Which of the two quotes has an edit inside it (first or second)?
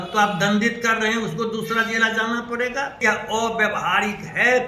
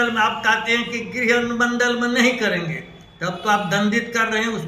first